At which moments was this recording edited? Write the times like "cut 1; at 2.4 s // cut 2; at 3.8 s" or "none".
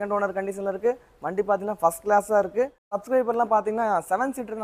cut 1; at 3.0 s

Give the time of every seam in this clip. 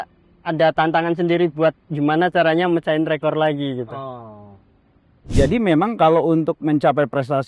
cut 1; at 5.3 s

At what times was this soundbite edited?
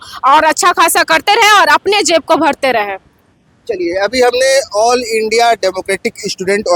none

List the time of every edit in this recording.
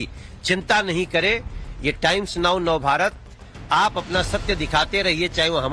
cut 1; at 2.6 s

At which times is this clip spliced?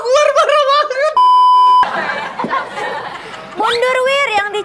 cut 1; at 1.1 s // cut 2; at 1.9 s

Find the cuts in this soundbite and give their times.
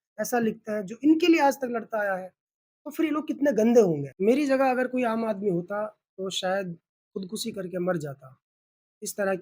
cut 1; at 4.1 s

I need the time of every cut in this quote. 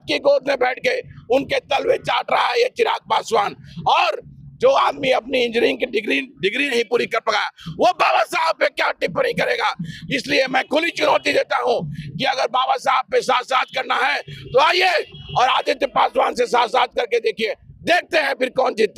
none

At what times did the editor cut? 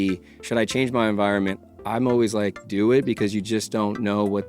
cut 1; at 1.8 s

